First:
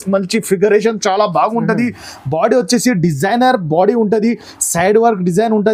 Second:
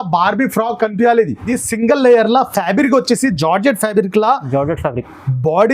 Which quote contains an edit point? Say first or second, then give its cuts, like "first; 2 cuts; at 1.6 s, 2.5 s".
second; 1 cut; at 1.5 s